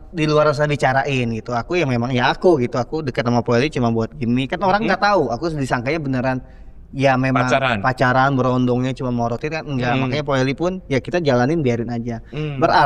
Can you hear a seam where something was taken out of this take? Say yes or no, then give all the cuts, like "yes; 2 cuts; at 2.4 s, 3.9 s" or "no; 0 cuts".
no; 0 cuts